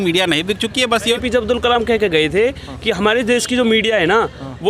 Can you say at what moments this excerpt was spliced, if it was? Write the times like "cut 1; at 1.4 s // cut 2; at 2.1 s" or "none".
cut 1; at 1.1 s